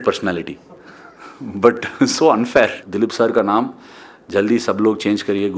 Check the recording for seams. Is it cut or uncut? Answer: cut